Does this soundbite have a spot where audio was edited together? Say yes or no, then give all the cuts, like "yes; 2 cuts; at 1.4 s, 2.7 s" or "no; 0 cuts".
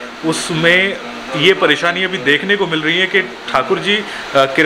no; 0 cuts